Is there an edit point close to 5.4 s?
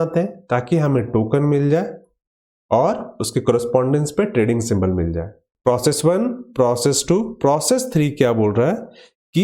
yes; 1 cut; at 5.4 s

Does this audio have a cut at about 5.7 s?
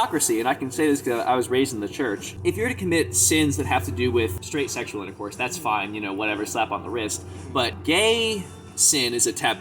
no; 3 cuts; at 2.3 s, 4.4 s, 7.8 s

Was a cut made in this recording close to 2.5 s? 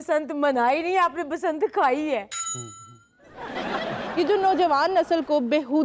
no; 1 cut; at 4.0 s

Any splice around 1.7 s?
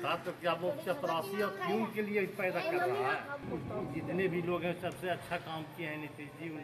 no; 1 cut; at 3.4 s

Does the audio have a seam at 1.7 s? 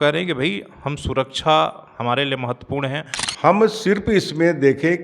no; 1 cut; at 3.3 s

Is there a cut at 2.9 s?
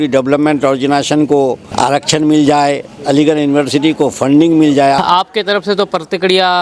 no; 2 cuts; at 1.6 s, 5.0 s

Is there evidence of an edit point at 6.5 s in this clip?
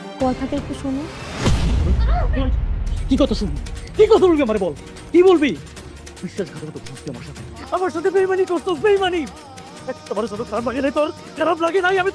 no; 0 cuts

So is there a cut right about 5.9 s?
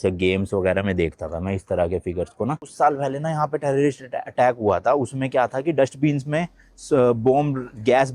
no; 1 cut; at 2.7 s

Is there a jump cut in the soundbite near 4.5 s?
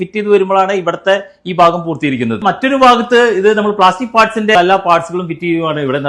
yes; 2 cuts; at 2.4 s, 4.5 s

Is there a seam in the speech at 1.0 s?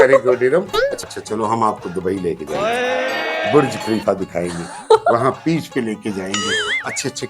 yes; 1 cut; at 1.0 s

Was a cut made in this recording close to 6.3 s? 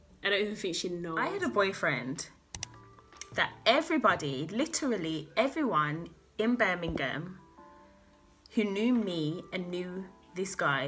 no; 1 cut; at 1.2 s

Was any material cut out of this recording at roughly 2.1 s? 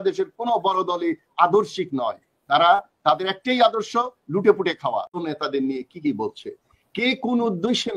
no; 1 cut; at 5.2 s

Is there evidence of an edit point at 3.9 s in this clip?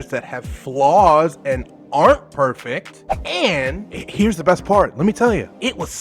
yes; 1 cut; at 3.9 s

